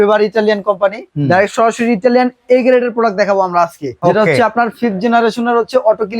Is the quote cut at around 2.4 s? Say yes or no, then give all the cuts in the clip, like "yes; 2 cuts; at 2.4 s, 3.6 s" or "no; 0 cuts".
no; 2 cuts; at 1.1 s, 3.9 s